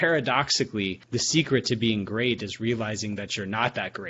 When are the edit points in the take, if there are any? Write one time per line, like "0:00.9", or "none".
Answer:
0:01.0